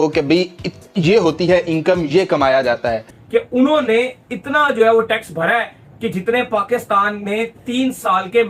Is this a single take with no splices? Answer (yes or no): no